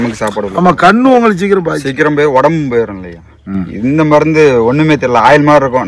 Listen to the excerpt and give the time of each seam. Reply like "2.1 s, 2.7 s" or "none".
none

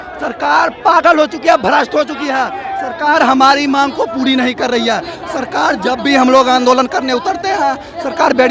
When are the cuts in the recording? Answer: none

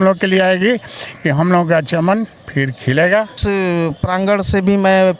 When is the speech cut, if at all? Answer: 3.4 s

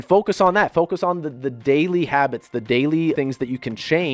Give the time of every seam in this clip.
3.2 s

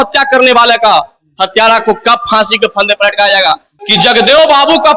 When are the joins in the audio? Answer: 3.7 s

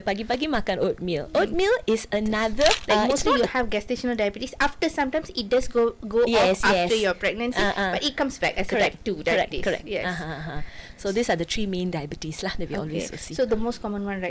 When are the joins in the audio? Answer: 2.8 s

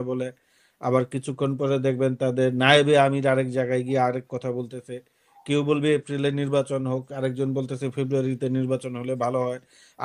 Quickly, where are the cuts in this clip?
none

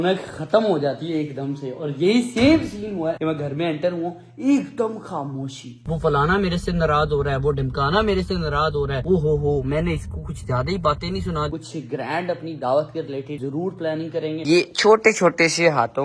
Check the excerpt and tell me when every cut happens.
5.8 s, 11.5 s, 14.4 s

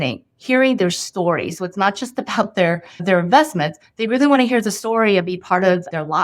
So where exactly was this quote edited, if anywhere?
none

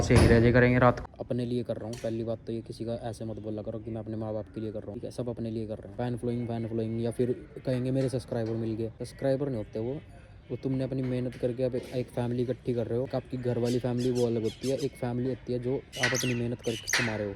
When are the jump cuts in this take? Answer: 1.0 s, 5.0 s, 5.9 s, 9.0 s, 13.1 s, 15.9 s

